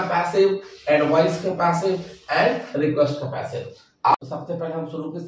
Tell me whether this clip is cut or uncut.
cut